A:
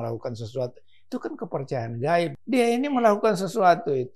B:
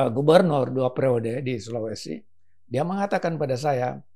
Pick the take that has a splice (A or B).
A